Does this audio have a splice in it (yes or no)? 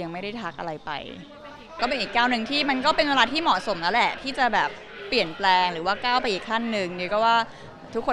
yes